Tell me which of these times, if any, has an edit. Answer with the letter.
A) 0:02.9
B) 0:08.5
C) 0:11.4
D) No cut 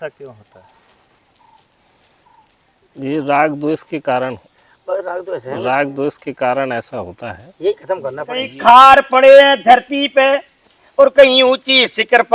B